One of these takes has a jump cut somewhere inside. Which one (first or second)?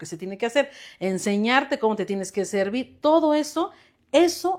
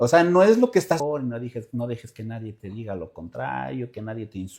second